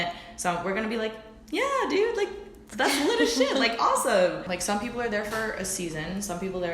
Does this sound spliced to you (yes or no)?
yes